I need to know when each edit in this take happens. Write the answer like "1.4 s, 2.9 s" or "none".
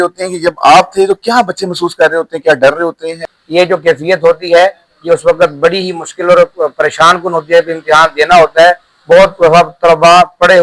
3.2 s